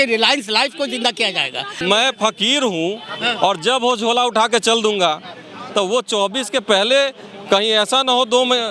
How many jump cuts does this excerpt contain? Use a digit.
1